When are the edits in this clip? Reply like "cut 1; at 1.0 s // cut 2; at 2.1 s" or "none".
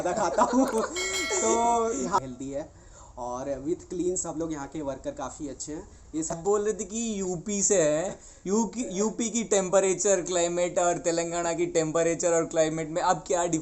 cut 1; at 2.2 s // cut 2; at 6.4 s

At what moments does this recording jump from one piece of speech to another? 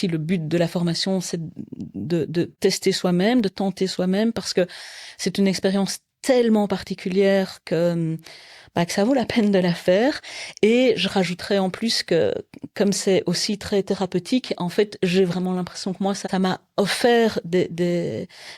cut 1; at 2.5 s // cut 2; at 16.3 s

